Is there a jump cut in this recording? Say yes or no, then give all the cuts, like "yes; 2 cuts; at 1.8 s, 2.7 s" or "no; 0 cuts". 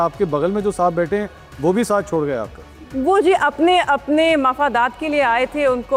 no; 0 cuts